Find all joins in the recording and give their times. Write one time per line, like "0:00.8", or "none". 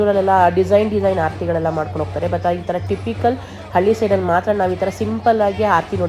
none